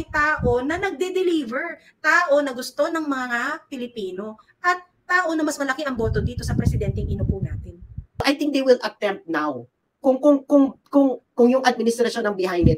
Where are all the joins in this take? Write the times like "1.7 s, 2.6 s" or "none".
8.2 s